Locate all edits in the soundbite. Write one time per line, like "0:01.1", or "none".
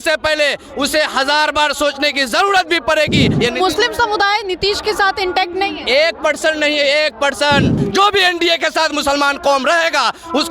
0:03.4
0:07.8